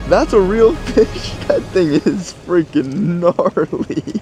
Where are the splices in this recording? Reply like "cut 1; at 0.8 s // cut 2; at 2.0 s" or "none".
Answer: none